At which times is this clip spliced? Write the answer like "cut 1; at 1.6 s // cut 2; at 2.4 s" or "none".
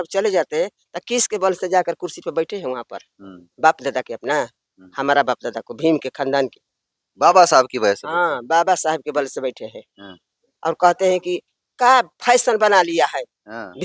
none